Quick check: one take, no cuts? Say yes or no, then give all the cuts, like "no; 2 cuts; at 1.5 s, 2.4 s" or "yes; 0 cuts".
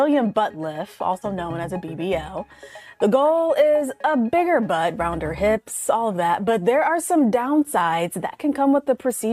yes; 0 cuts